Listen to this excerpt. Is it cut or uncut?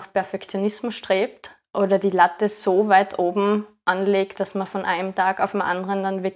uncut